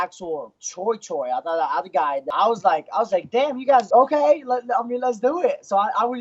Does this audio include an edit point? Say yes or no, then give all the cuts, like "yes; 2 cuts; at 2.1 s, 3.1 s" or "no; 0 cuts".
yes; 2 cuts; at 2.2 s, 3.9 s